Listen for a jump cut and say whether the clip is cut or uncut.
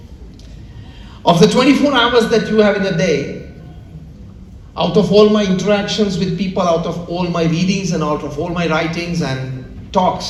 uncut